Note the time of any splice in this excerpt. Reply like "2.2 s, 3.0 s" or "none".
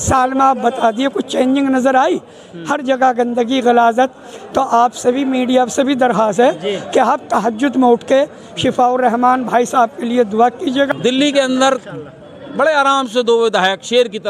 10.9 s